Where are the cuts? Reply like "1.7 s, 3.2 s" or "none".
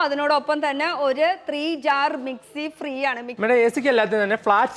3.3 s